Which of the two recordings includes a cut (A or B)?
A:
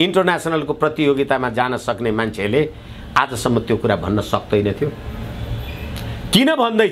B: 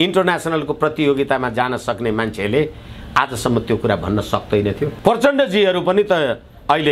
B